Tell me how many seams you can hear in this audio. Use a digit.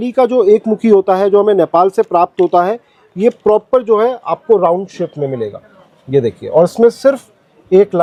0